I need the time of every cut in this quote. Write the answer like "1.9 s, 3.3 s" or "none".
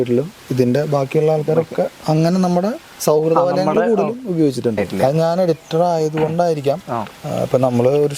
4.9 s